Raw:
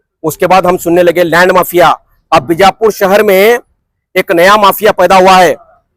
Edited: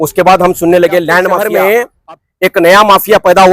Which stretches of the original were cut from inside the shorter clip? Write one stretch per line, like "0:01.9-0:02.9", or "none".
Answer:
0:01.7-0:03.2